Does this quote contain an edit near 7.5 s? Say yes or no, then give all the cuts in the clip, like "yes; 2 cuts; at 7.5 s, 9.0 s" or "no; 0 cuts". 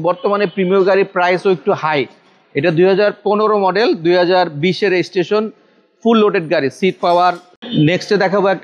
yes; 1 cut; at 7.5 s